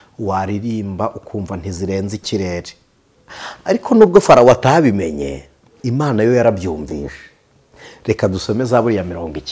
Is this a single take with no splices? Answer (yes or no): yes